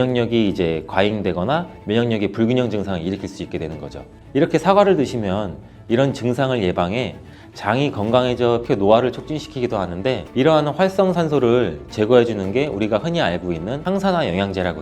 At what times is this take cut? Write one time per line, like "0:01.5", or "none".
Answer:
0:08.6